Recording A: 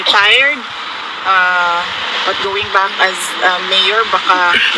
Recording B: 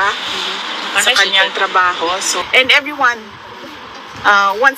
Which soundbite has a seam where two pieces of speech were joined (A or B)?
B